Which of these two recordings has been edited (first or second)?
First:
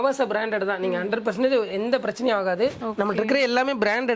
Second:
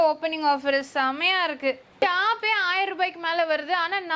second